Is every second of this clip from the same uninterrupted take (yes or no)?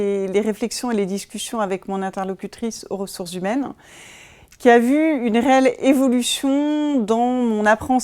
yes